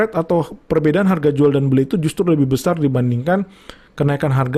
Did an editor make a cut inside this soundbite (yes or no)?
no